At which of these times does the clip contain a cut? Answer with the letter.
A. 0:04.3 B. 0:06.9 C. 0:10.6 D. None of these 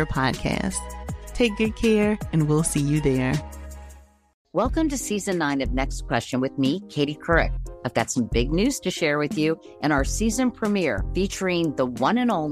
A